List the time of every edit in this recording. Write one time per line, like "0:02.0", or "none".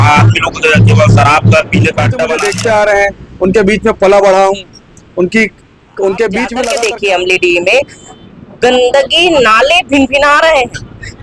0:02.3
0:06.7